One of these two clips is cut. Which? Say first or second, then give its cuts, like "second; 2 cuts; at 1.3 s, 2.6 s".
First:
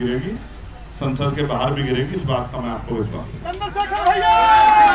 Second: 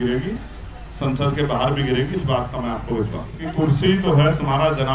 second; 1 cut; at 3.4 s